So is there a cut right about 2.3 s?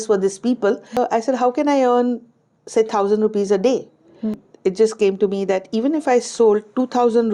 no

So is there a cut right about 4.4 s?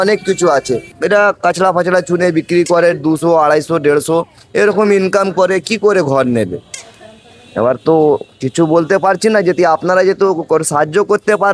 no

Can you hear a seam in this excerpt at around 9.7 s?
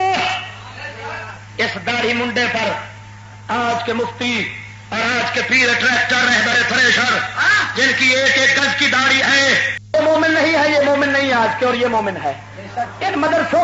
yes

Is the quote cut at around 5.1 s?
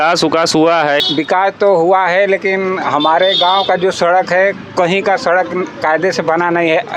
no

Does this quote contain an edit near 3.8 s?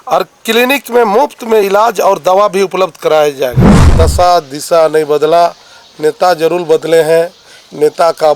yes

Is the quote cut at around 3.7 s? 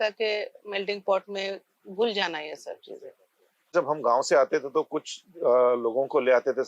yes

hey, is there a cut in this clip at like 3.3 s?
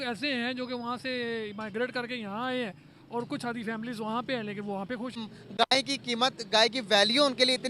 no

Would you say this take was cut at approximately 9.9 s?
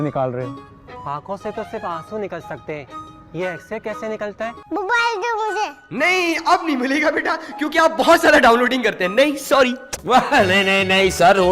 yes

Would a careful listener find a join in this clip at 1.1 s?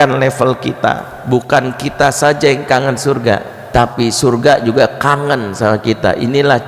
yes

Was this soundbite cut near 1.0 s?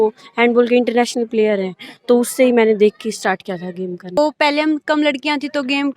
no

